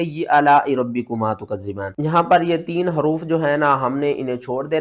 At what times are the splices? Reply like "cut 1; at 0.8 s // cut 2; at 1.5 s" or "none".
cut 1; at 1.9 s